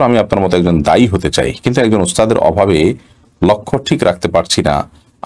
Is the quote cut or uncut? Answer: uncut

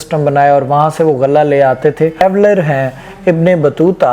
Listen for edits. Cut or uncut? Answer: cut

